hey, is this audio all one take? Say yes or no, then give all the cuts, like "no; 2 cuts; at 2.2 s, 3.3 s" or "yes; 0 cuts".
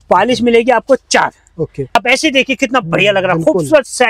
no; 1 cut; at 1.9 s